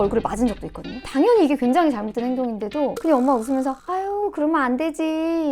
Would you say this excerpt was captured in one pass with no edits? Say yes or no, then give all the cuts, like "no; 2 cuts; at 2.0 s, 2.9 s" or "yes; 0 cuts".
no; 1 cut; at 1.1 s